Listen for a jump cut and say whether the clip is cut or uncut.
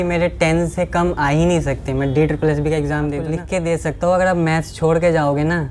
cut